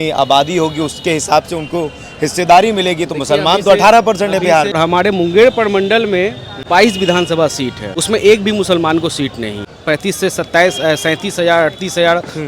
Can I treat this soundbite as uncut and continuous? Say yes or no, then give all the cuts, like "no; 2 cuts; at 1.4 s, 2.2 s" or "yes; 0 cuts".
no; 4 cuts; at 4.8 s, 6.5 s, 7.9 s, 9.7 s